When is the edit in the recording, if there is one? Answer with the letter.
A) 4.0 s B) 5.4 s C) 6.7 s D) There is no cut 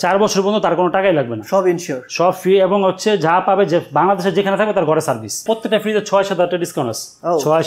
B